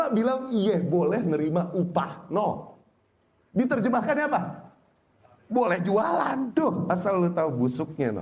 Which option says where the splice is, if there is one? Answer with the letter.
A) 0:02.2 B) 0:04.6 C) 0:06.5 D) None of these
C